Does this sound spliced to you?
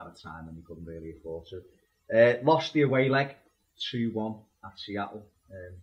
yes; 1 cut; at 2.4 s

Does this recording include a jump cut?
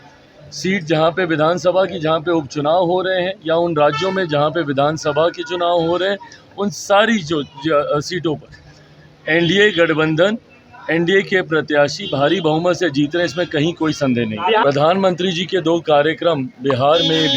yes; 1 cut; at 14.6 s

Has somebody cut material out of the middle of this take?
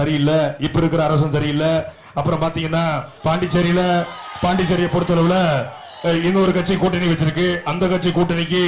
yes; 2 cuts; at 3.1 s, 4.2 s

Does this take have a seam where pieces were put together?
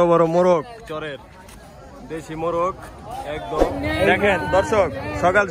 yes; 1 cut; at 3.7 s

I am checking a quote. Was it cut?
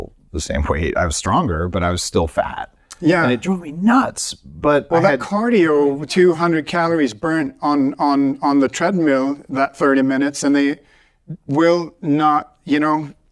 no; 0 cuts

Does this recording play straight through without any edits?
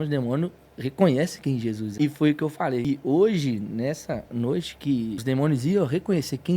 no; 3 cuts; at 1.9 s, 2.8 s, 5.2 s

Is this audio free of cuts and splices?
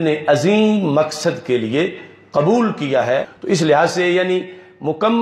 yes; 0 cuts

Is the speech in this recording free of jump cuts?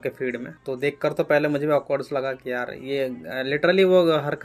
no; 1 cut; at 1.0 s

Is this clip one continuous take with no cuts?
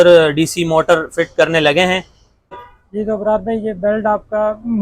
no; 1 cut; at 2.7 s

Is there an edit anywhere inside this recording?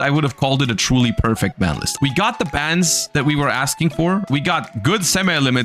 yes; 2 cuts; at 1.9 s, 4.3 s

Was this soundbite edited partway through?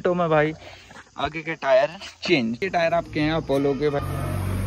yes; 1 cut; at 2.6 s

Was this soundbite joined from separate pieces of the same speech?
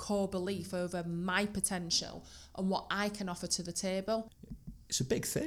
yes; 1 cut; at 4.4 s

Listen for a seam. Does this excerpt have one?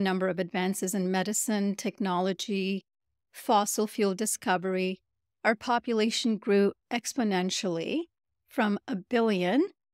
no; 0 cuts

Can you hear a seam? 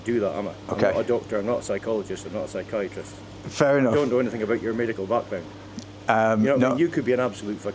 no; 0 cuts

